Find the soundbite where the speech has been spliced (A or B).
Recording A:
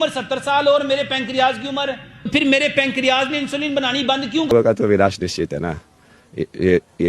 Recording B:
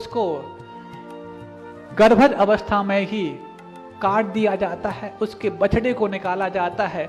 A